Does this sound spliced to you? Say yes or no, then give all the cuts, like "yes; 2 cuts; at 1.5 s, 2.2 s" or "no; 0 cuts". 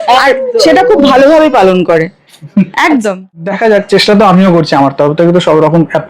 yes; 1 cut; at 3.2 s